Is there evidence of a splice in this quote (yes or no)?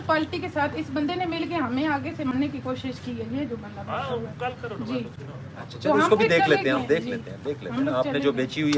no